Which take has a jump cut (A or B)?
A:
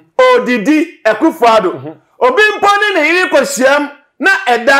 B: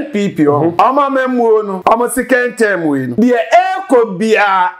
B